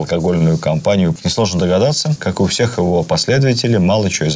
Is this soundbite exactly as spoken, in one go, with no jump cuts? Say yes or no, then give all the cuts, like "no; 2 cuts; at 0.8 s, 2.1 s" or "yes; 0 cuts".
no; 2 cuts; at 1.2 s, 2.1 s